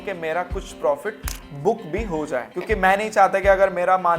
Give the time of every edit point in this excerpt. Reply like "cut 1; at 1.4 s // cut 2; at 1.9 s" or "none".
cut 1; at 2.5 s